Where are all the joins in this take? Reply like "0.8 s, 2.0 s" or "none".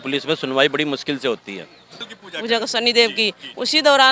2.0 s